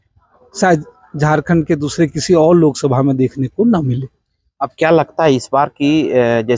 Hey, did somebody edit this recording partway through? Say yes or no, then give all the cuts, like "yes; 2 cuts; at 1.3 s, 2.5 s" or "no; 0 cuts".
no; 0 cuts